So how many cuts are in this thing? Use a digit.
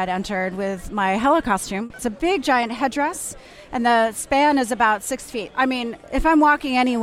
2